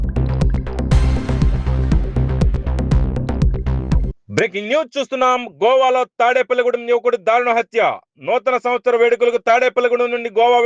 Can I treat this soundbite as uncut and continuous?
no; 1 cut; at 4.1 s

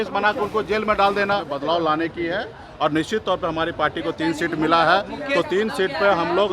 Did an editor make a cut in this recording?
yes; 1 cut; at 1.5 s

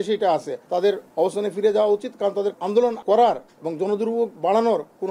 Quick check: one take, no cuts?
no; 2 cuts; at 0.8 s, 2.6 s

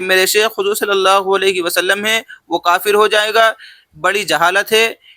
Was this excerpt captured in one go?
yes; 0 cuts

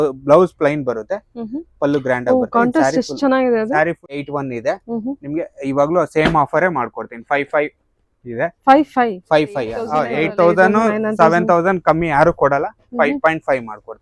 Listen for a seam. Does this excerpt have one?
yes; 2 cuts; at 4.1 s, 9.9 s

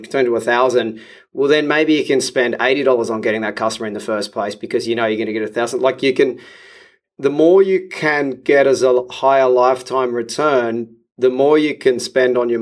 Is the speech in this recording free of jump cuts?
yes; 0 cuts

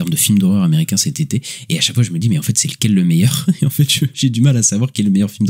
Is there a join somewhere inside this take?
yes; 1 cut; at 4.1 s

